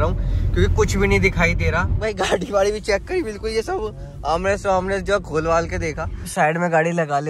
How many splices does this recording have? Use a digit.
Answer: 2